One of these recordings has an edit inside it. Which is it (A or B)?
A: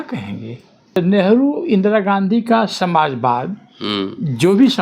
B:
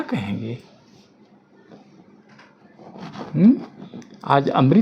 A